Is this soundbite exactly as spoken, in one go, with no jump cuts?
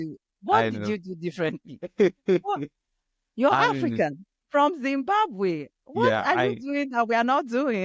yes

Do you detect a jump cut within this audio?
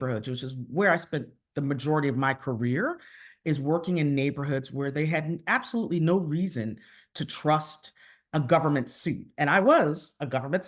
no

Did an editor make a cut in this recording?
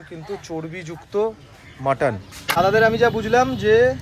yes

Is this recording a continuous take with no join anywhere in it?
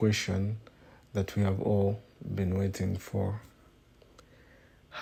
yes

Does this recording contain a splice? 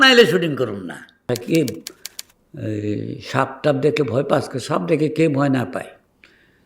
yes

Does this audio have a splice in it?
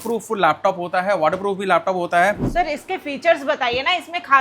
yes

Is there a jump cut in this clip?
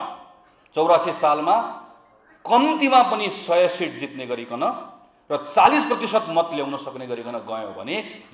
no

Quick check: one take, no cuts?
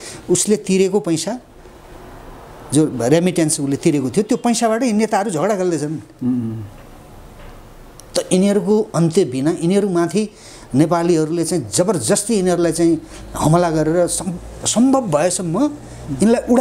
yes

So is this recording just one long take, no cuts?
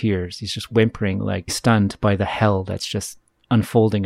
no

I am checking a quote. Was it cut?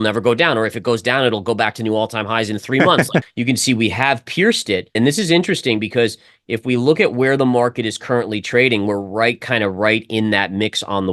yes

